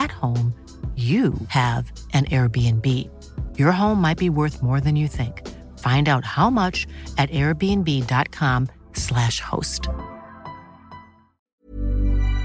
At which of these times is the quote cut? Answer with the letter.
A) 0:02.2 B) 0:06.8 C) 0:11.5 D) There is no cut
C